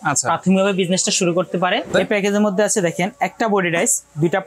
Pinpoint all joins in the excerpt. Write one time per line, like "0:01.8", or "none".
0:01.9